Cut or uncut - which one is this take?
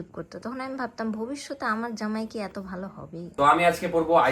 cut